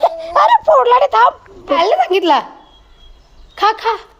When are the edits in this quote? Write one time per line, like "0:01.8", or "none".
0:01.8